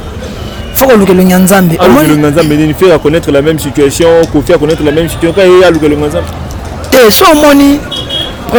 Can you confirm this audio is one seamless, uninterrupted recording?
yes; 0 cuts

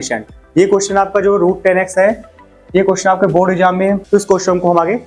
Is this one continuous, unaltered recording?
no; 1 cut; at 4.0 s

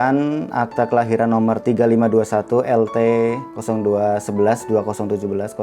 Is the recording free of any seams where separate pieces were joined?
no; 1 cut; at 3.5 s

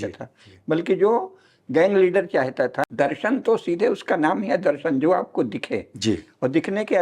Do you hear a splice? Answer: yes; 1 cut; at 2.8 s

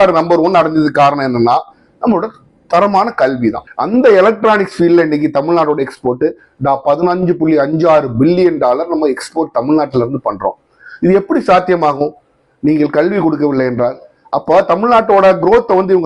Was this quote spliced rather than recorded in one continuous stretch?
yes; 1 cut; at 3.6 s

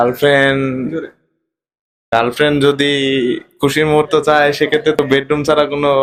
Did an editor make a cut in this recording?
no; 0 cuts

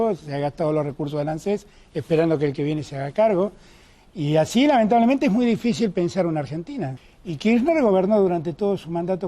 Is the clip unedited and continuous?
no; 1 cut; at 7.0 s

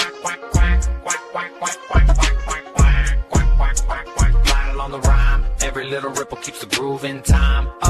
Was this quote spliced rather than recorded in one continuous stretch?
no; 0 cuts

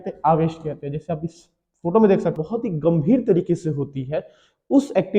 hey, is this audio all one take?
no; 1 cut; at 2.4 s

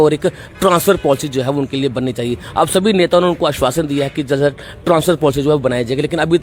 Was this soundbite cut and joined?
no; 0 cuts

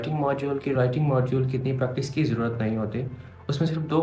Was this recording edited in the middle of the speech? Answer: no; 0 cuts

